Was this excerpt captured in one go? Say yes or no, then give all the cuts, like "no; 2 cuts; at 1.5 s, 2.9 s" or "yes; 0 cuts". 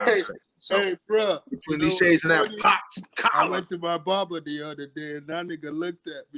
yes; 0 cuts